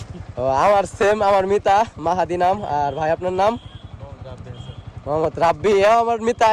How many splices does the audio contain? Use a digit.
0